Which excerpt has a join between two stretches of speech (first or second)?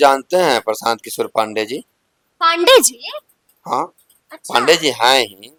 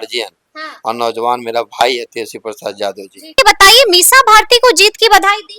second